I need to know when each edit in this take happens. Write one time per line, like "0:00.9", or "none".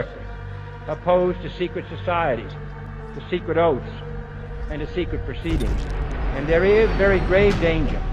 0:06.0